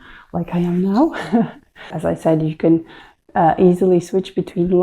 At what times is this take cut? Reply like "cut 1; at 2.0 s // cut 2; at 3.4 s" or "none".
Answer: cut 1; at 1.9 s